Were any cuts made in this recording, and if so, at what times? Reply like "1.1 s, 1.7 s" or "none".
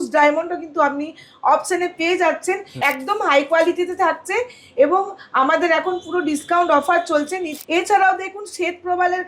2.7 s, 7.5 s